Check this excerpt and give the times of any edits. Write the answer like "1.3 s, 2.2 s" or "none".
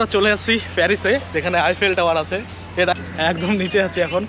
2.9 s